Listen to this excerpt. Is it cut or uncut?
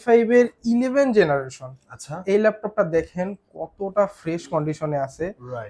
uncut